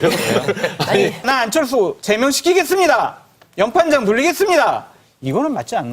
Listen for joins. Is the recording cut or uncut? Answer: cut